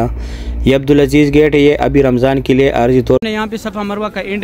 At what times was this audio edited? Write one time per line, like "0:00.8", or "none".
0:03.2